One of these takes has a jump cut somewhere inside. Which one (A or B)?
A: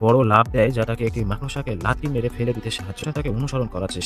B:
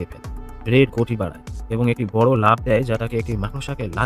A